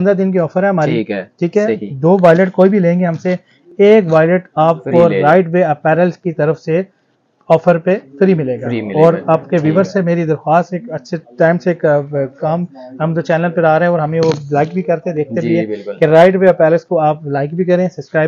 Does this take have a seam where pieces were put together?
no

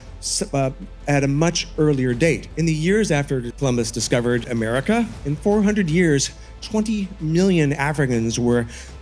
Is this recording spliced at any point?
yes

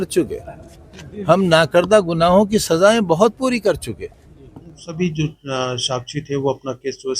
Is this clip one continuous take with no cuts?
no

